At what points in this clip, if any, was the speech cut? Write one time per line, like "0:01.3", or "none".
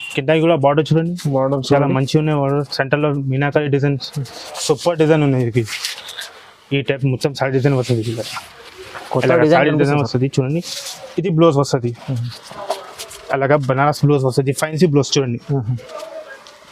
none